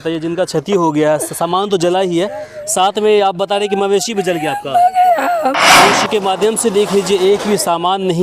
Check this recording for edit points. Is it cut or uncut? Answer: cut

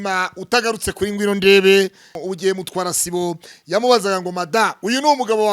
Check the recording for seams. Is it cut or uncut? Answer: cut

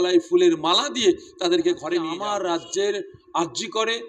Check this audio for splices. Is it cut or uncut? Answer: cut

